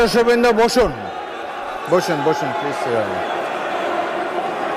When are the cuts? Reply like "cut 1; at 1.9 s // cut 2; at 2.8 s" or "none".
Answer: none